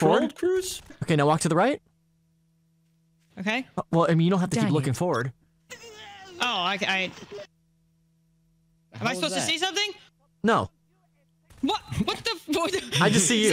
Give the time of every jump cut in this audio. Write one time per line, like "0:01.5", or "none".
0:00.9